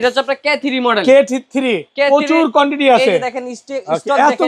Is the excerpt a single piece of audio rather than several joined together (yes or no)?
yes